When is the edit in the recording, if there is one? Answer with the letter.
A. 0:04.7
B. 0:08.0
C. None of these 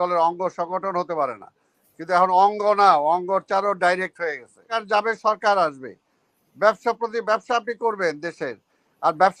A